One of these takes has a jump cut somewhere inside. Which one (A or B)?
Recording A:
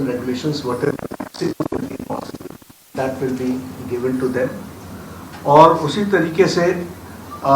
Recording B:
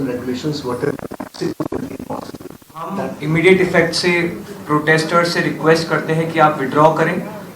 B